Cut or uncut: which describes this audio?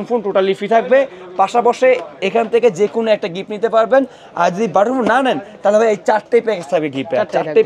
uncut